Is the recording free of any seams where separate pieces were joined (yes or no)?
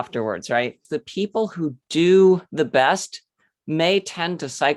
no